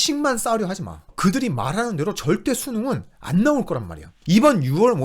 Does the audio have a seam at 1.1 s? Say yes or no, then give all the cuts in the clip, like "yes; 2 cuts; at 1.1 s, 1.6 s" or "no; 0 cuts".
yes; 1 cut; at 1.1 s